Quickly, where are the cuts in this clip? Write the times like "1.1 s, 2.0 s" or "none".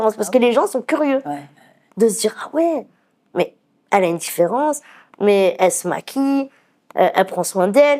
none